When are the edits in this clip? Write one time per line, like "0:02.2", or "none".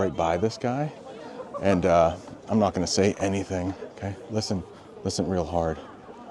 none